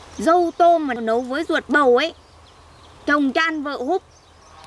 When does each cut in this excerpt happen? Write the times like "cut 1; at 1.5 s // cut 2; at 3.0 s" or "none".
cut 1; at 0.9 s